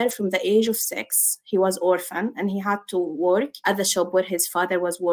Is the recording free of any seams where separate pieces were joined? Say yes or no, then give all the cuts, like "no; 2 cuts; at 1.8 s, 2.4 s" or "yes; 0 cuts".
yes; 0 cuts